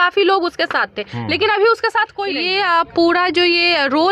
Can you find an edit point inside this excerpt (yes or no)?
yes